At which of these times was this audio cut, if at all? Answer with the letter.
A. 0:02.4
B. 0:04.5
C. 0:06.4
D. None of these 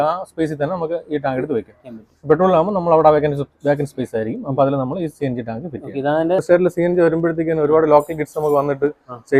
C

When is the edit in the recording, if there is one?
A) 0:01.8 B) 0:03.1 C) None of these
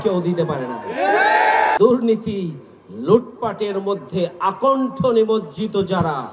A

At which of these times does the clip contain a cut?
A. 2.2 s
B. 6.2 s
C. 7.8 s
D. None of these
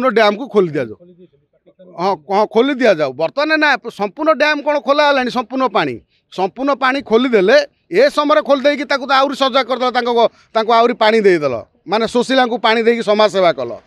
D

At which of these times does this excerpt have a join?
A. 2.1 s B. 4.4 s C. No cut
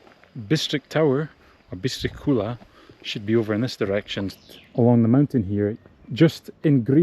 B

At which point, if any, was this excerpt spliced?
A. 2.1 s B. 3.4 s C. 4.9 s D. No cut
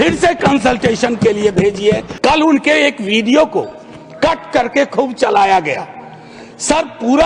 A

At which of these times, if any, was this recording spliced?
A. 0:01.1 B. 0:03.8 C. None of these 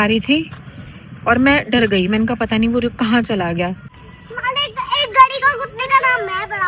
B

